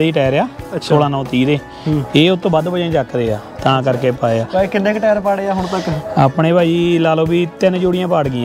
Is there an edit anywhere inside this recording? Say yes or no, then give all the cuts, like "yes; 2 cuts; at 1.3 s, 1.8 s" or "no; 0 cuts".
no; 0 cuts